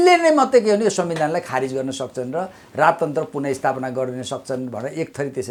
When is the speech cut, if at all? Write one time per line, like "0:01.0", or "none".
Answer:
none